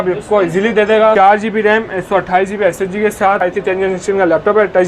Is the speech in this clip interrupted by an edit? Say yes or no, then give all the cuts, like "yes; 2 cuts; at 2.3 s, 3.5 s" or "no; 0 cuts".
yes; 2 cuts; at 1.1 s, 3.4 s